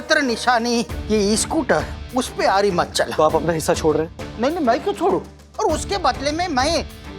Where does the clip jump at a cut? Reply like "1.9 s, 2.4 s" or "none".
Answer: 3.1 s, 5.4 s